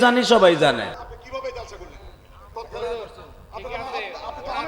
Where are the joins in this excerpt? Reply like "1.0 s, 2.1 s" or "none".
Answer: 1.0 s

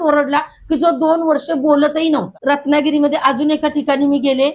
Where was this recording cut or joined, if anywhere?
2.3 s

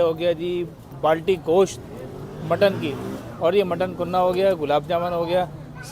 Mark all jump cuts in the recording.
0.9 s

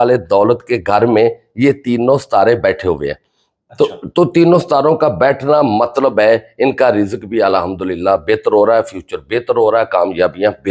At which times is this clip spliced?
none

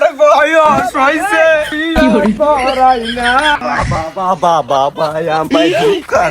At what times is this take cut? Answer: 1.7 s, 3.5 s

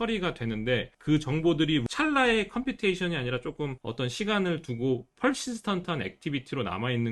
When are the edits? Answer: 0.9 s, 1.8 s, 3.8 s

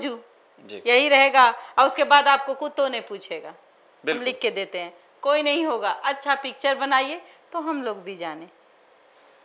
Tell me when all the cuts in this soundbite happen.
none

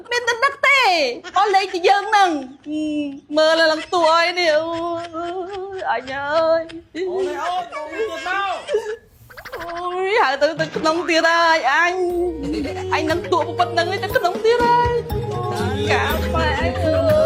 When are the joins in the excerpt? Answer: none

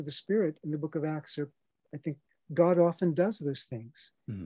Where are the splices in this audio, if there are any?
2.3 s

